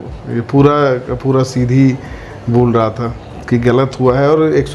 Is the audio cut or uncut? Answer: uncut